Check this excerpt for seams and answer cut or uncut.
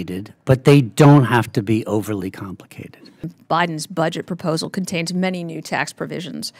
cut